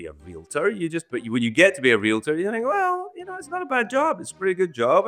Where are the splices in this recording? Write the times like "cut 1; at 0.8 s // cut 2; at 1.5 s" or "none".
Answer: none